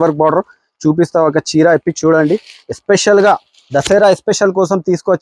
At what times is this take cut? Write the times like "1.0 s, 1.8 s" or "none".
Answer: none